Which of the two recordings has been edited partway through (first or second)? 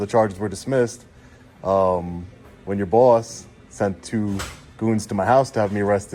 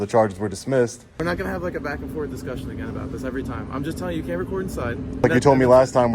second